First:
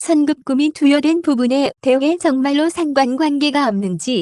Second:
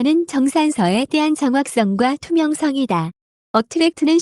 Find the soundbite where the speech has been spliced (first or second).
second